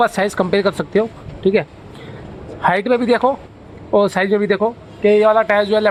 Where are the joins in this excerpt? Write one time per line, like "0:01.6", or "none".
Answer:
none